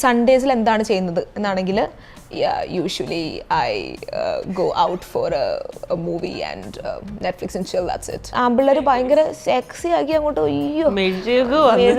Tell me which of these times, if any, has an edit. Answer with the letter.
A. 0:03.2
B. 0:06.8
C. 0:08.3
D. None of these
C